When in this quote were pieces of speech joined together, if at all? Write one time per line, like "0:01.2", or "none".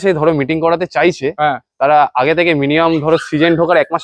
none

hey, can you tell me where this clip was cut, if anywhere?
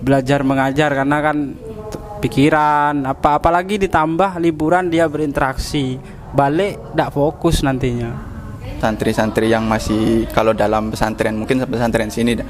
0:08.8

